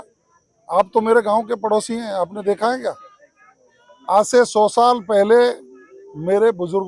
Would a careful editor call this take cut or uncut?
uncut